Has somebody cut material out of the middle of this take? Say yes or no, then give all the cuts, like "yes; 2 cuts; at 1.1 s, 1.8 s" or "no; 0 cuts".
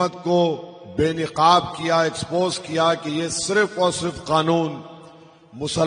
no; 0 cuts